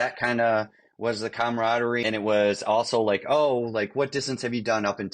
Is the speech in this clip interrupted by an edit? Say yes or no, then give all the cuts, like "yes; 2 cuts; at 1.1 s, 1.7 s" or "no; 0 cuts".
yes; 1 cut; at 2.0 s